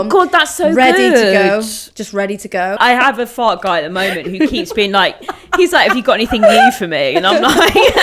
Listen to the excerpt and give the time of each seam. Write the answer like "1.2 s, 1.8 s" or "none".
2.8 s

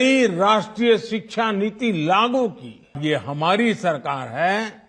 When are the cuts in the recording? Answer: 3.0 s

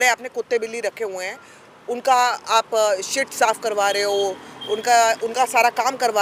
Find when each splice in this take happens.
none

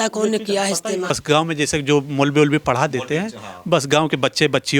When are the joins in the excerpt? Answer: 1.1 s

